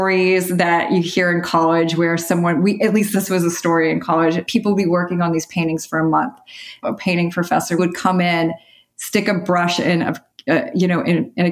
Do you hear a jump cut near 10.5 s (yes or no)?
no